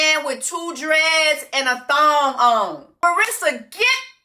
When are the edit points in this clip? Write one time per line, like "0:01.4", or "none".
0:03.0